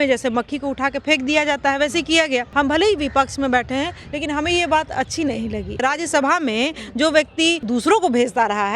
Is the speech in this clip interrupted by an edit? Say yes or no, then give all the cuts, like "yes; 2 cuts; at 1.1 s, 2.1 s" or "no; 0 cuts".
yes; 3 cuts; at 2.5 s, 5.8 s, 7.6 s